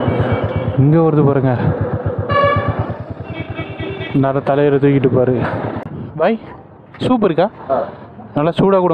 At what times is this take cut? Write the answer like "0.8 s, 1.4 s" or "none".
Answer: 5.8 s